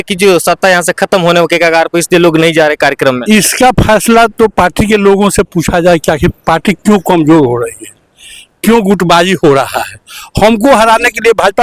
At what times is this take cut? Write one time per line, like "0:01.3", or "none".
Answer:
none